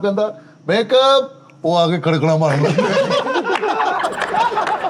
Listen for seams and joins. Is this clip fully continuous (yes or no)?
yes